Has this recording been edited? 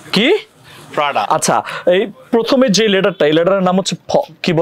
yes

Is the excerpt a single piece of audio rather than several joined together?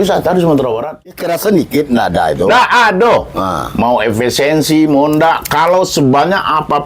no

